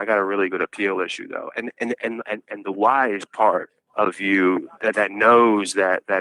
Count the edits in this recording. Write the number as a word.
two